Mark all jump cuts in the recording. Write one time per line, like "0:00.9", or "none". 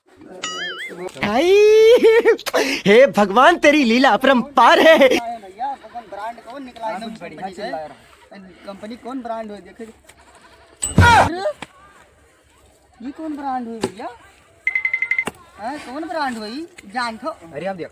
0:01.1